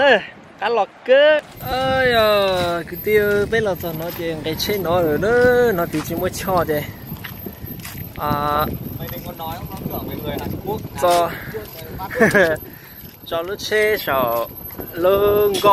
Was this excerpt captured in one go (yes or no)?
no